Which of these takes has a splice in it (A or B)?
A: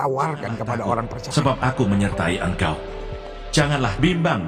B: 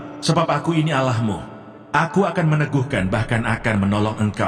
A